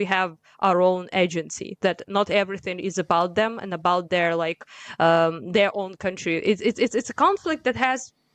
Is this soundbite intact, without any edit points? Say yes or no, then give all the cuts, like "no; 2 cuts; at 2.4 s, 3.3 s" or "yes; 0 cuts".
yes; 0 cuts